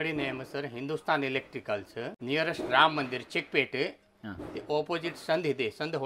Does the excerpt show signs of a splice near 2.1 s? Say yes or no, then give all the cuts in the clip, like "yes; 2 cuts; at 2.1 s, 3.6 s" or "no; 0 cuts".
yes; 1 cut; at 2.1 s